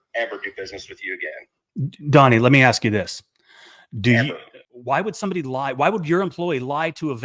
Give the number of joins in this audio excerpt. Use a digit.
1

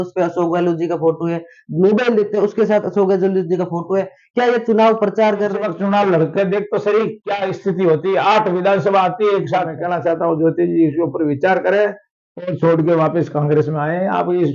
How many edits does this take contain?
2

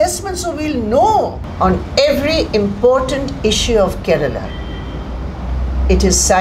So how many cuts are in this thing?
1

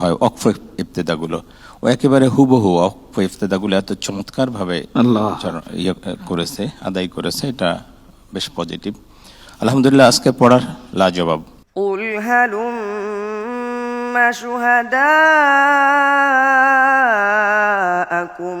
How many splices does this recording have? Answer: 1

